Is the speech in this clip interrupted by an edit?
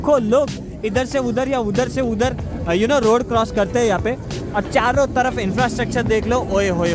no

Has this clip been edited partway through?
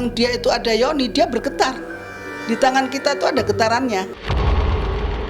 yes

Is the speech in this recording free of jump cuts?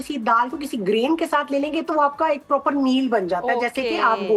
yes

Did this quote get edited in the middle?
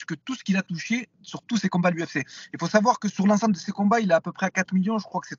no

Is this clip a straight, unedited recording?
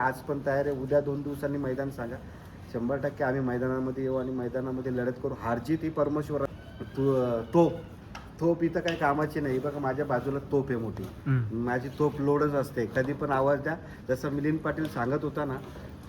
no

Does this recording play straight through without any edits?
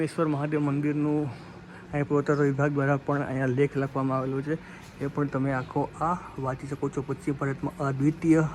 yes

